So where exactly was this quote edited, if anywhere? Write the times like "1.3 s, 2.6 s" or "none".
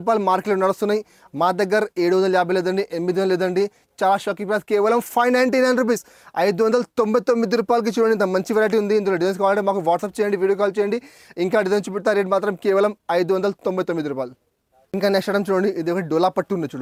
none